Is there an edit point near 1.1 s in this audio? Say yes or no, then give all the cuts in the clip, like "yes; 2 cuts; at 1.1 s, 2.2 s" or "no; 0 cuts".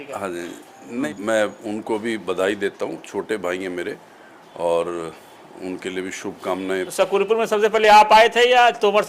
yes; 2 cuts; at 1.1 s, 6.9 s